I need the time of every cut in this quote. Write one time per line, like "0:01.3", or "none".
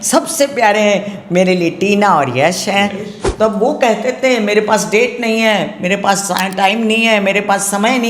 0:03.2